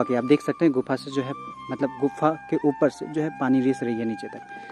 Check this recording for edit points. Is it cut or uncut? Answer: uncut